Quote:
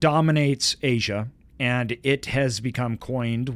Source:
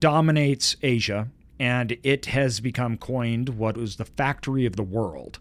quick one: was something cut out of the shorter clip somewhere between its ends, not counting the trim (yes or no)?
no